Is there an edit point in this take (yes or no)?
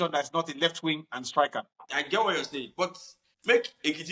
yes